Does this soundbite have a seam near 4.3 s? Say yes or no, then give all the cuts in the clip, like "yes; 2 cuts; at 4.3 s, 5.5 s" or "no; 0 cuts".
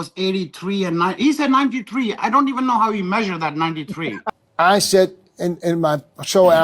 yes; 1 cut; at 4.3 s